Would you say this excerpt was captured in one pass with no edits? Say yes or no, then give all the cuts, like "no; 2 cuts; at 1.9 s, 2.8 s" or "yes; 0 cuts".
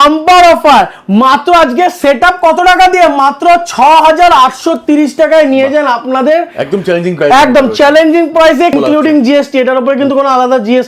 no; 1 cut; at 8.7 s